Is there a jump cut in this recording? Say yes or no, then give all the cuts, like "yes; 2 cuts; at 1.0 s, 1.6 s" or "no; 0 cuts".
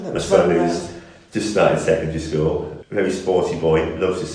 yes; 1 cut; at 2.8 s